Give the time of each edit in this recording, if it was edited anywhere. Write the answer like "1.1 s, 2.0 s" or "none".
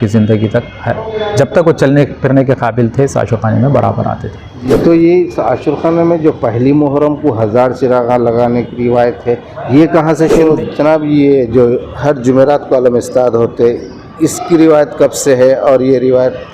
4.5 s, 10.0 s